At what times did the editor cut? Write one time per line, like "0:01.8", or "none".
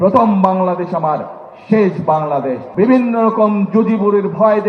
0:02.6